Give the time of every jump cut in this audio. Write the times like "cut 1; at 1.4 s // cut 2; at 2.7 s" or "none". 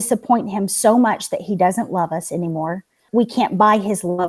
cut 1; at 3.0 s